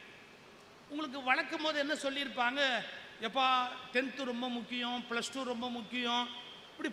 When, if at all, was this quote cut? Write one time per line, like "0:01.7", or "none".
none